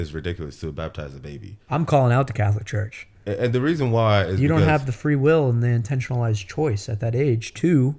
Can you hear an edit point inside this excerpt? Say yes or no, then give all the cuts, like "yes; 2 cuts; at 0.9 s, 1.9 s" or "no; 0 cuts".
yes; 1 cut; at 1.5 s